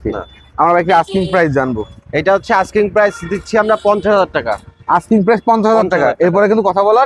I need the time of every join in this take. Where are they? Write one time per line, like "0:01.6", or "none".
none